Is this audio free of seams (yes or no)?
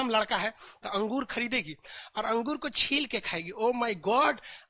yes